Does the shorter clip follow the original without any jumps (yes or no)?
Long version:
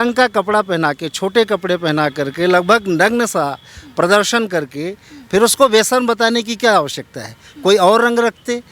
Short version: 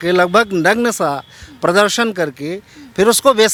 yes